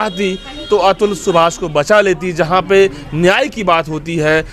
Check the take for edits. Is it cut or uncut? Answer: uncut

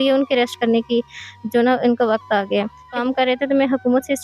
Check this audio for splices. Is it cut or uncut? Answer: cut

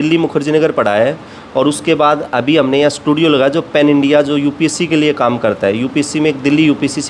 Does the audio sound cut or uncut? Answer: uncut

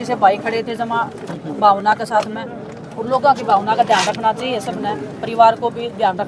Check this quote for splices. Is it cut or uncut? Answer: uncut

